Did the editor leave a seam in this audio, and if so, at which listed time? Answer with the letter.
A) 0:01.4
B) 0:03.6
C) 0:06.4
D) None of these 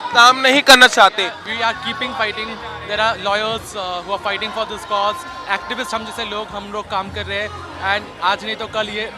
A